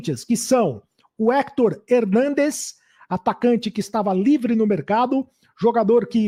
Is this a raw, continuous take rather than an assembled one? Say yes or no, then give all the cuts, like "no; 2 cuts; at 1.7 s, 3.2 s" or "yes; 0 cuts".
yes; 0 cuts